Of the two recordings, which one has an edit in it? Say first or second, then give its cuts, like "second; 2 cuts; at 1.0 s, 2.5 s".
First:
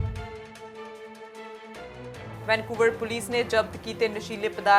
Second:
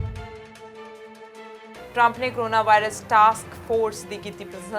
second; 1 cut; at 1.9 s